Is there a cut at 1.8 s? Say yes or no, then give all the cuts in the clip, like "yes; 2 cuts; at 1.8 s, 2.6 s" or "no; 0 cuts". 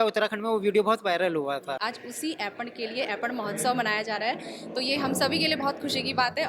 yes; 1 cut; at 1.8 s